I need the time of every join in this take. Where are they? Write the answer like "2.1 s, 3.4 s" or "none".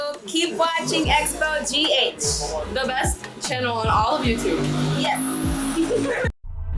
none